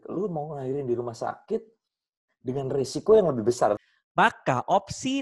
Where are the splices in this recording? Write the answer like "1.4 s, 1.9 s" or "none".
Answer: 3.8 s